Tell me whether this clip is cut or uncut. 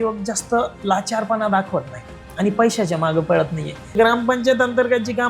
cut